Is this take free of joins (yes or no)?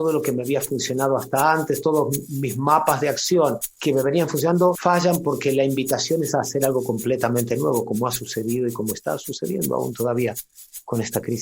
no